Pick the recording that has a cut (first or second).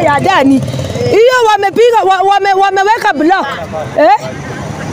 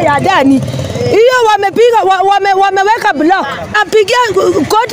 second